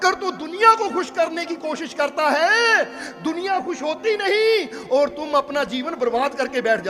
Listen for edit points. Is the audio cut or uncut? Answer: uncut